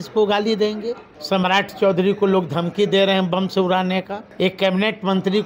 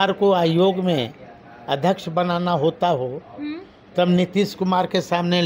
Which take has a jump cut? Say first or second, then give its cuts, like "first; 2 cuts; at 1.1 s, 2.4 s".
first; 2 cuts; at 1.1 s, 4.2 s